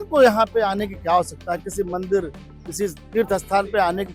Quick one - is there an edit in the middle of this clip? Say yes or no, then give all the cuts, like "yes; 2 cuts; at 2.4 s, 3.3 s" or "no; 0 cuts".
no; 0 cuts